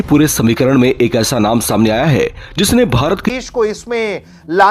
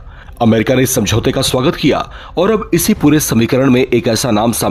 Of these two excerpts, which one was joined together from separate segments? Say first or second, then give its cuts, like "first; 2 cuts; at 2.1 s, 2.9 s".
first; 1 cut; at 3.2 s